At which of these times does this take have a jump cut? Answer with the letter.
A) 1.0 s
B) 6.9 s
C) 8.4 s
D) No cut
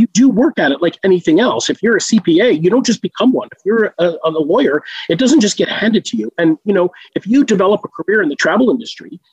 C